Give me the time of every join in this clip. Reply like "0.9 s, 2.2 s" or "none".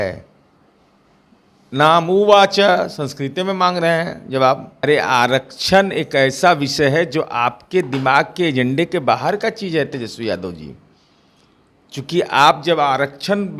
4.7 s